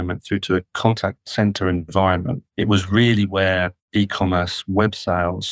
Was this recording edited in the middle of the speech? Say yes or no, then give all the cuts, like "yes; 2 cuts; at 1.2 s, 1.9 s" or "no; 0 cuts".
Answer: yes; 3 cuts; at 0.9 s, 2.4 s, 3.8 s